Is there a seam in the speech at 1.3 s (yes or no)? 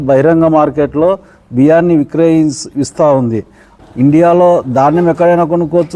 no